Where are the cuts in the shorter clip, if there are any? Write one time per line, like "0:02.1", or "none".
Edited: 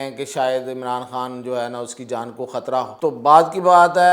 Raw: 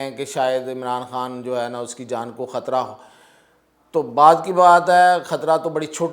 0:02.9